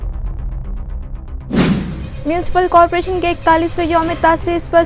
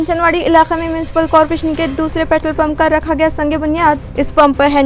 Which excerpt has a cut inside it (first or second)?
first